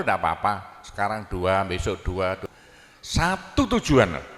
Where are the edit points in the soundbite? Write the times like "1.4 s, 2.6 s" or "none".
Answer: 2.4 s